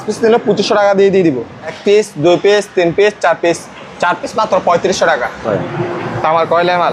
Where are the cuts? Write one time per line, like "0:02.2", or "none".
0:01.7
0:05.4